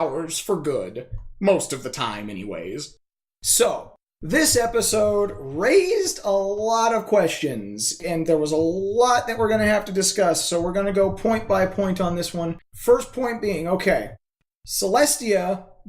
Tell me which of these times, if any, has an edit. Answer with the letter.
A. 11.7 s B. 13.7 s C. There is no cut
A